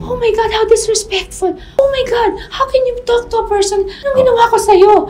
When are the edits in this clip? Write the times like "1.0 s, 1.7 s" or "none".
1.7 s, 4.0 s